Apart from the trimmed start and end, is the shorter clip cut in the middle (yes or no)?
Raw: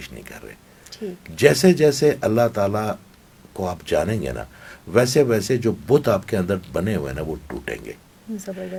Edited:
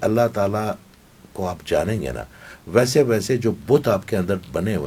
no